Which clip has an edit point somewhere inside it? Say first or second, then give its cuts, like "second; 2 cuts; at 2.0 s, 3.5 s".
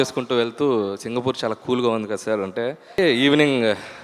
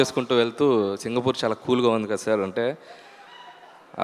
first; 1 cut; at 3.0 s